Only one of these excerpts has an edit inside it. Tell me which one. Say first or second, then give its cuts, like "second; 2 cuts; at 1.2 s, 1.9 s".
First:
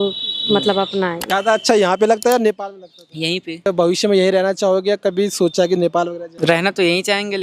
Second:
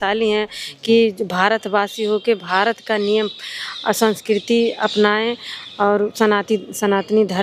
first; 3 cuts; at 1.2 s, 3.7 s, 6.2 s